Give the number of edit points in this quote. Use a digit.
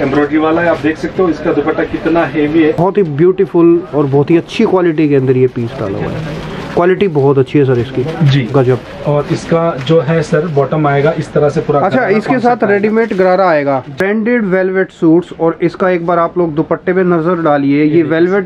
2